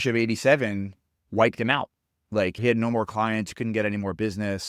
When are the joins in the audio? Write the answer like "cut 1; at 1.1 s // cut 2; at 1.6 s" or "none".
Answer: cut 1; at 2.6 s